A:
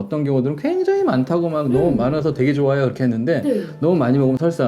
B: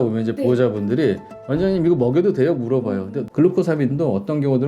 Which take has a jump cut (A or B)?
B